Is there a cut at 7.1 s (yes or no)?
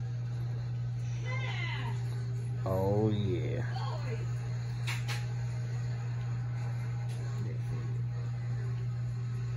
no